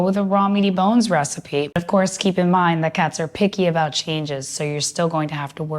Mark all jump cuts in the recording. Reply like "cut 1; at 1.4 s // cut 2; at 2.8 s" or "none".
cut 1; at 1.8 s